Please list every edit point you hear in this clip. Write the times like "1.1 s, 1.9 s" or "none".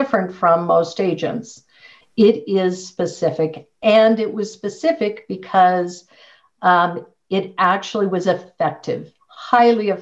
2.0 s

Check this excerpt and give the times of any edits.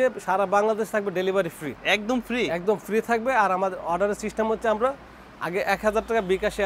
none

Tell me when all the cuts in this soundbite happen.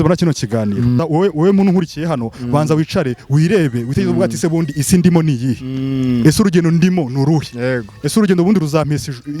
1.0 s

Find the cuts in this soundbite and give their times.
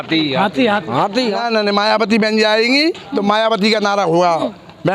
1.4 s

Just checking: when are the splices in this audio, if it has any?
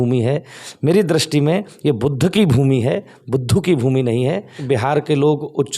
4.6 s

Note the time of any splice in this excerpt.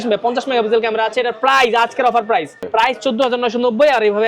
2.7 s

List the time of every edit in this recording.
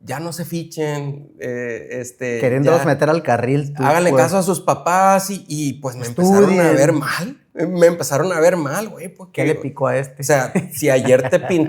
none

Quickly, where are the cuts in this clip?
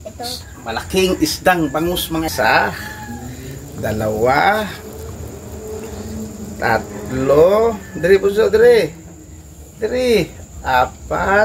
2.3 s

